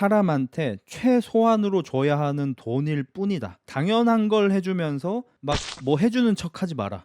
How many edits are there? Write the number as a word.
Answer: one